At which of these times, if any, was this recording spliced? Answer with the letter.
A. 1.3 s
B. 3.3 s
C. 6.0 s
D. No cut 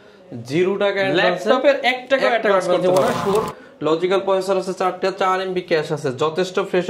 B